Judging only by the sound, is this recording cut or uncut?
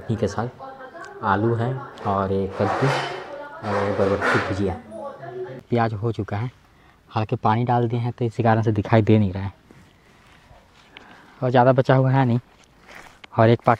cut